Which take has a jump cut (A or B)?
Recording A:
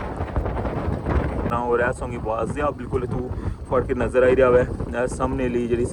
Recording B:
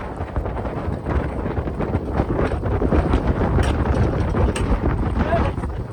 A